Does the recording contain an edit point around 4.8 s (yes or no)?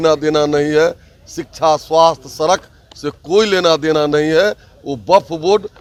no